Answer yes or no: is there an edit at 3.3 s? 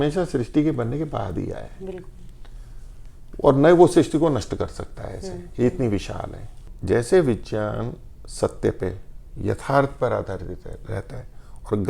no